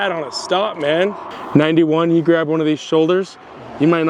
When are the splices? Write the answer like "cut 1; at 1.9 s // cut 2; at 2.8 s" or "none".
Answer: cut 1; at 1.3 s